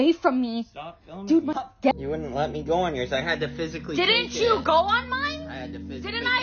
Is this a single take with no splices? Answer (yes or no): no